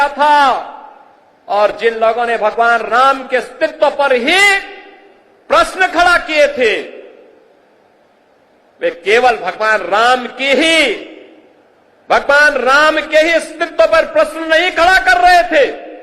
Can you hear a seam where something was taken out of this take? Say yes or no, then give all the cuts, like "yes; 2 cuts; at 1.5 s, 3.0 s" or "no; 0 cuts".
no; 0 cuts